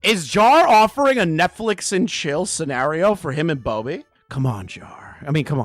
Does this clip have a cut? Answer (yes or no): yes